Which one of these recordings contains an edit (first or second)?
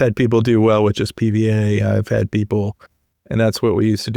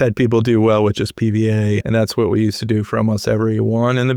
second